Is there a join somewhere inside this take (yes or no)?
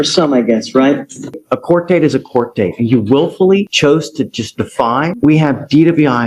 yes